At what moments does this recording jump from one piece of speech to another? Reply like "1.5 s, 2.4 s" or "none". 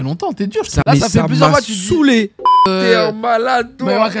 0.8 s, 2.6 s